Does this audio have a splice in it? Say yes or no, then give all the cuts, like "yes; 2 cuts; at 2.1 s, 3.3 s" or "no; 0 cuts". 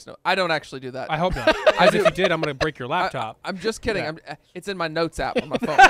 no; 0 cuts